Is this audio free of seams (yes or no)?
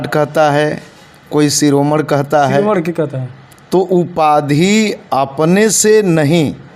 yes